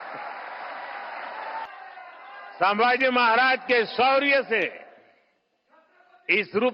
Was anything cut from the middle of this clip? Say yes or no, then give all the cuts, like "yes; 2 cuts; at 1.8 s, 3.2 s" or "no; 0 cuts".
yes; 1 cut; at 2.5 s